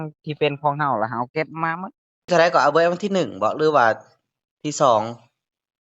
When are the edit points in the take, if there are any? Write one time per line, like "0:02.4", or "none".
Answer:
0:02.3